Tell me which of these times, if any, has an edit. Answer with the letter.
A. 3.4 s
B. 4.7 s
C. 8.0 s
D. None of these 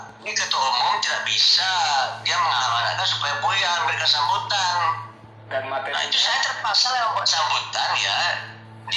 D